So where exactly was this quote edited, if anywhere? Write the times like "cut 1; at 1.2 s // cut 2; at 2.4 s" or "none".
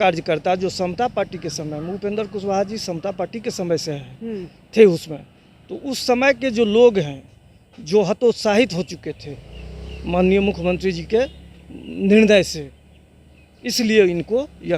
none